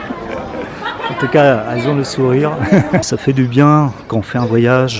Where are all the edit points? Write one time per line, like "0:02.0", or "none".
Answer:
0:03.0